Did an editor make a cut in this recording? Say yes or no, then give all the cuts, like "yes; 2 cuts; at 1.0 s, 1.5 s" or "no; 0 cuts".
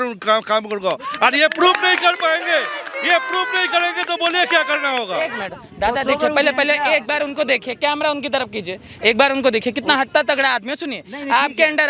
yes; 1 cut; at 5.4 s